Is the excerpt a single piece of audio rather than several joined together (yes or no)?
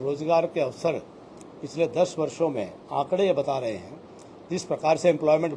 yes